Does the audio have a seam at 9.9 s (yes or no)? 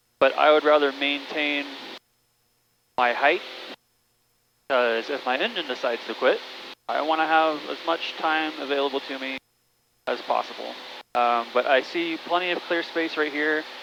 no